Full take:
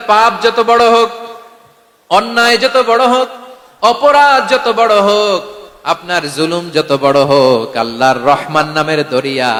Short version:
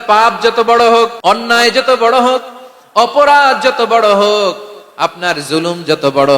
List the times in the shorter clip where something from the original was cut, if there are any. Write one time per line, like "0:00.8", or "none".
0:01.2